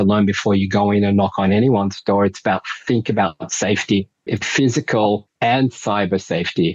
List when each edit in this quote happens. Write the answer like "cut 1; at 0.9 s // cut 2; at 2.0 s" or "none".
cut 1; at 4.4 s